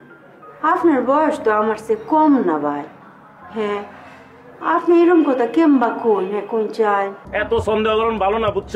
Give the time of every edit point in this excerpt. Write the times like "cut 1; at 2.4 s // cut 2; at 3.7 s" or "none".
cut 1; at 7.2 s